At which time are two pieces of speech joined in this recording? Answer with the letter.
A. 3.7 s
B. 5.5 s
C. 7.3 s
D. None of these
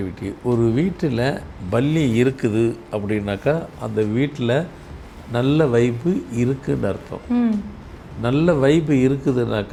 D